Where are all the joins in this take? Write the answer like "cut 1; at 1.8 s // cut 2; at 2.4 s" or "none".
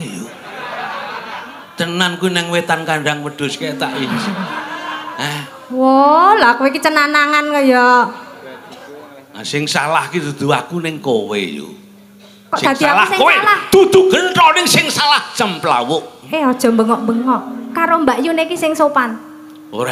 none